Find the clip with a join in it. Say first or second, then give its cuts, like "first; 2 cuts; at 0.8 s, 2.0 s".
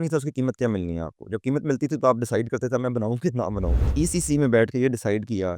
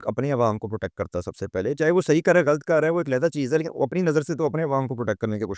first; 1 cut; at 3.9 s